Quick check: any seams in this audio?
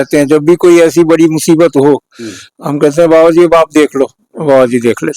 no; 0 cuts

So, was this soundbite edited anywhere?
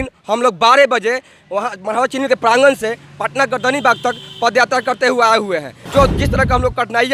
yes; 1 cut; at 5.9 s

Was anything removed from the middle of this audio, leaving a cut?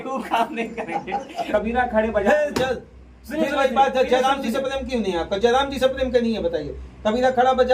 yes; 1 cut; at 1.5 s

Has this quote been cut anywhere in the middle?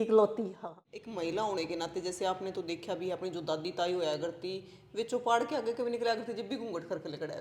yes; 1 cut; at 1.1 s

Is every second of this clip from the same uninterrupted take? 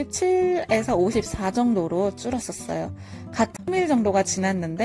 no; 1 cut; at 3.5 s

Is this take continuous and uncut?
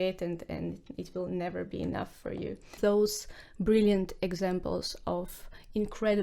no; 1 cut; at 2.8 s

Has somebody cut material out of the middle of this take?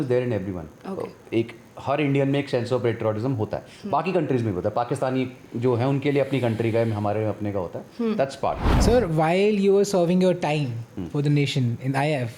yes; 1 cut; at 8.7 s

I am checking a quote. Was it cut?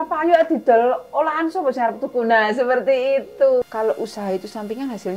yes; 1 cut; at 3.6 s

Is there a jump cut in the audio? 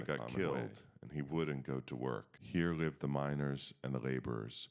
yes; 1 cut; at 2.3 s

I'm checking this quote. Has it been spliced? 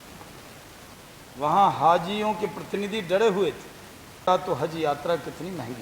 yes; 1 cut; at 4.3 s

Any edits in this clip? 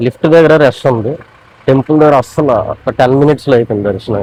no; 0 cuts

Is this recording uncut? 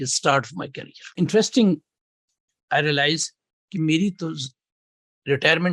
no; 1 cut; at 1.1 s

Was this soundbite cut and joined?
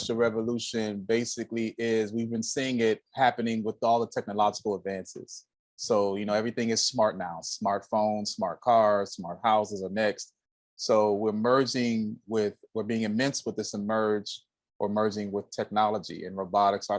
no; 0 cuts

